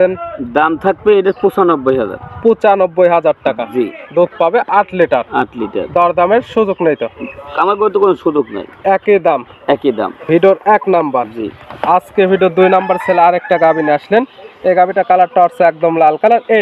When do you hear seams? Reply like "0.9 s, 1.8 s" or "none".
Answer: none